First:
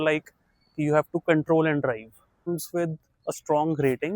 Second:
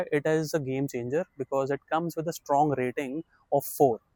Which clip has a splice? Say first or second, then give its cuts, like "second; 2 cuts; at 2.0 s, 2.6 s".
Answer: first; 1 cut; at 2.5 s